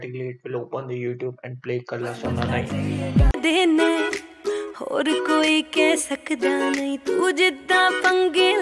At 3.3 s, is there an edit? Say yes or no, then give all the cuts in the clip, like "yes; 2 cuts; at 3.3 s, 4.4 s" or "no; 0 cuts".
yes; 1 cut; at 3.3 s